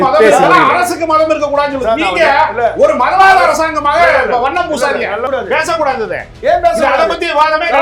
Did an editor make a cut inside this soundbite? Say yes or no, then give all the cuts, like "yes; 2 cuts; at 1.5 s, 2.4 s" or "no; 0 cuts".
yes; 1 cut; at 5.3 s